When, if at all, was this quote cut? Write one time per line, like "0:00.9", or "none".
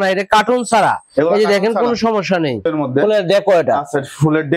0:02.7